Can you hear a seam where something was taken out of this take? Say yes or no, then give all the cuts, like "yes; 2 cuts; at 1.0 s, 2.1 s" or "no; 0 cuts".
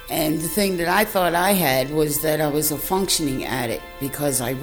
no; 0 cuts